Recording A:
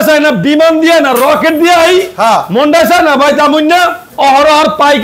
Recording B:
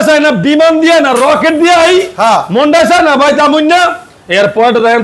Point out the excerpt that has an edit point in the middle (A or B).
A